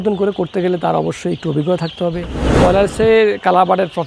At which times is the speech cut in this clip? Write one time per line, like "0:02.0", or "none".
0:02.6